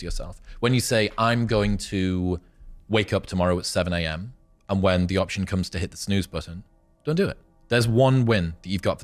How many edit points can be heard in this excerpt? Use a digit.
1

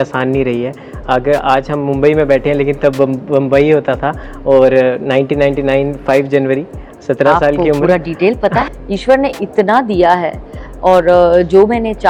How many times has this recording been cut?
1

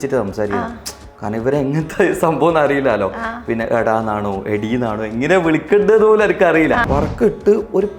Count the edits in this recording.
1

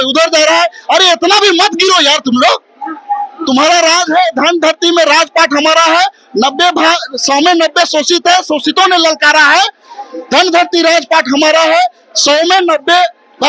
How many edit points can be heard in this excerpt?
0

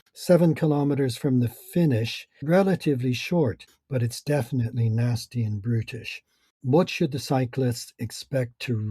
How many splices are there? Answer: 3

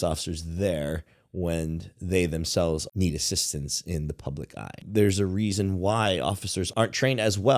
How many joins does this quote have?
3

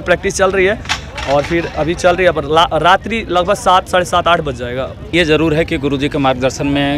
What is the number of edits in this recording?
1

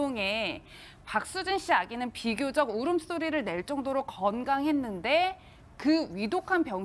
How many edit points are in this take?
1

